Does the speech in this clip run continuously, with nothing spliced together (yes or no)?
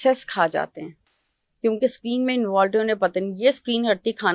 yes